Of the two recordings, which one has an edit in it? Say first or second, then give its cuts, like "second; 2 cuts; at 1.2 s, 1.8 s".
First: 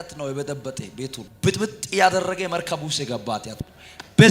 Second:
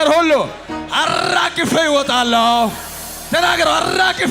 first; 1 cut; at 1.2 s